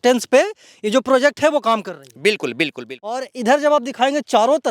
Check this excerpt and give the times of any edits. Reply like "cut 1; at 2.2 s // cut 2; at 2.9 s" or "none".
cut 1; at 3.2 s